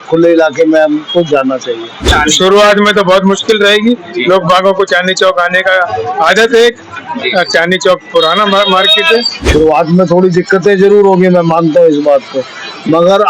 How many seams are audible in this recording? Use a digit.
2